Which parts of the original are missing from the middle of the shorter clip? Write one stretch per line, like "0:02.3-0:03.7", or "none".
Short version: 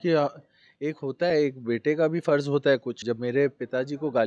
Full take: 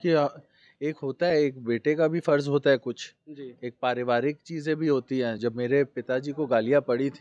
0:03.0-0:05.4